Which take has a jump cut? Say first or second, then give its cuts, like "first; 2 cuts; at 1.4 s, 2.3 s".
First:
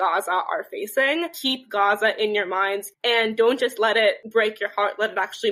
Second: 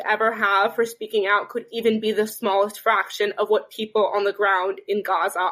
first; 3 cuts; at 1.4 s, 2.8 s, 4.2 s